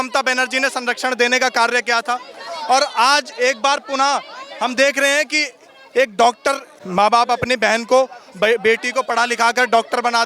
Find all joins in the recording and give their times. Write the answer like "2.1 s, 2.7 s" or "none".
6.7 s